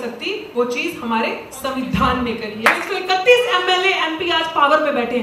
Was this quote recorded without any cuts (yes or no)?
no